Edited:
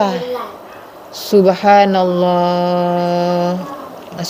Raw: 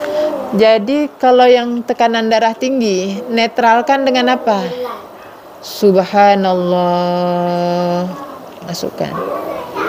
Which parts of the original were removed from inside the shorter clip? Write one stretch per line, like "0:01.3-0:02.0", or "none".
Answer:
none